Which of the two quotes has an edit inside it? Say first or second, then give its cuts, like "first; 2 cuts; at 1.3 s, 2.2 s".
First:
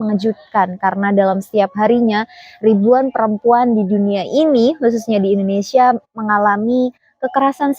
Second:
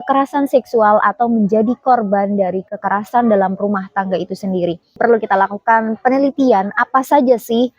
second; 1 cut; at 5.0 s